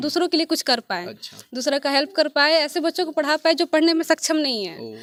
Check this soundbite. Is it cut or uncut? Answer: uncut